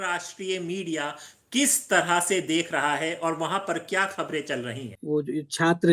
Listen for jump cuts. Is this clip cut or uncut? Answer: cut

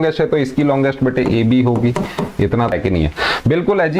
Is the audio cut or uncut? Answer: cut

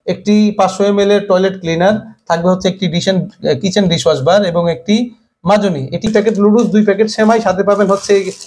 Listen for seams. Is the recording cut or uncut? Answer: cut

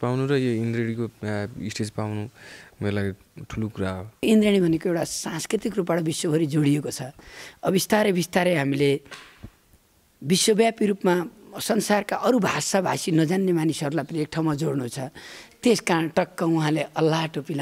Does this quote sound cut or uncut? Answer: cut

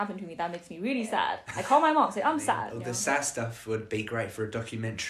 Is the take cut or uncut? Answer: cut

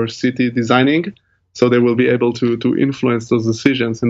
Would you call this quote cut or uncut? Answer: uncut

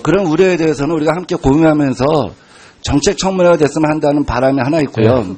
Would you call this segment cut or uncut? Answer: cut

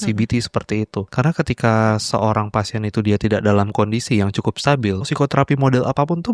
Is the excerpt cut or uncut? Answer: cut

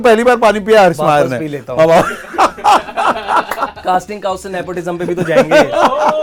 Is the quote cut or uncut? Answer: uncut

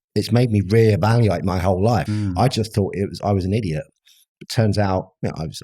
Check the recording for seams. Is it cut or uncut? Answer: cut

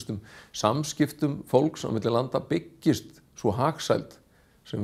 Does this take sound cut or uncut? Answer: uncut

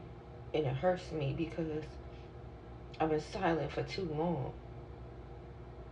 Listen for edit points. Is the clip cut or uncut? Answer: uncut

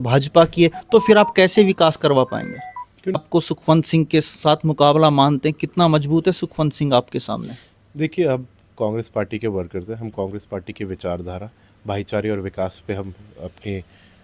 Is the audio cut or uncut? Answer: cut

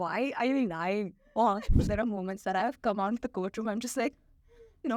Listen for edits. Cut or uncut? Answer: cut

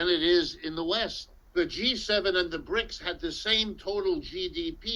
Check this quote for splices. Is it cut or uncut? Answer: uncut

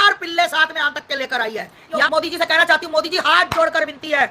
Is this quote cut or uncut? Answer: cut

